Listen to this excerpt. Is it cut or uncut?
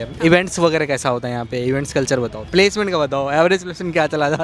cut